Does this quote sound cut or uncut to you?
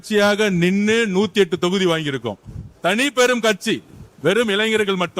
uncut